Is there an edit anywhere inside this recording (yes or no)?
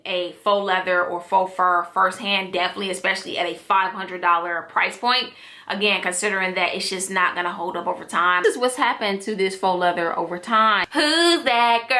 yes